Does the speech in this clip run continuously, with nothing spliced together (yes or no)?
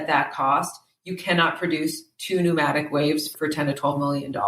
no